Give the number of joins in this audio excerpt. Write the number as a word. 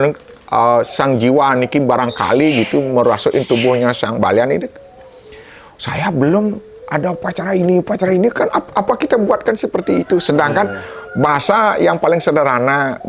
zero